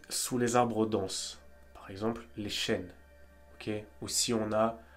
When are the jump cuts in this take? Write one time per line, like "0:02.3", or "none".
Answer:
none